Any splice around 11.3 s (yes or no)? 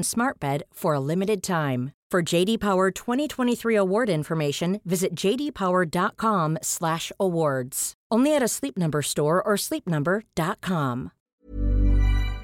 yes